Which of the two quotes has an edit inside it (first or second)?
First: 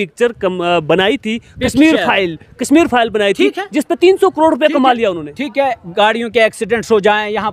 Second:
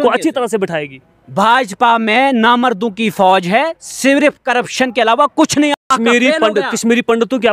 second